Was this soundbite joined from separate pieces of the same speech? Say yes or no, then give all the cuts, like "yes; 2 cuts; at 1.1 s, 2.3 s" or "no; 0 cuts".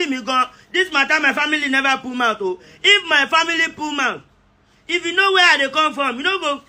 no; 0 cuts